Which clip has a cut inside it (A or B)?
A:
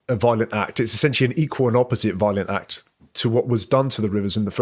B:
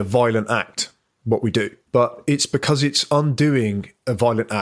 B